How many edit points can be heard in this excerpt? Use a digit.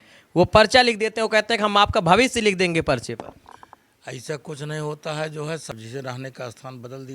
1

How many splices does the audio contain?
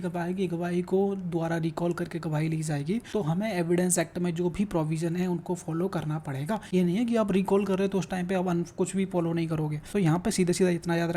3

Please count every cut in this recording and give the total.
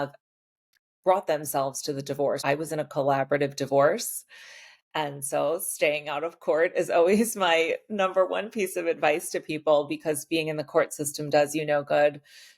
1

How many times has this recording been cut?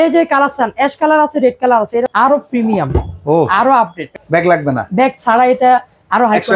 2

